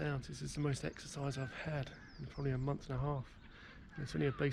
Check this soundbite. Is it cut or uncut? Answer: uncut